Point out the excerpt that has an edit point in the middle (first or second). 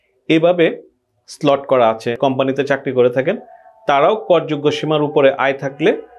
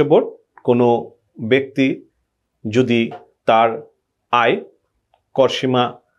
first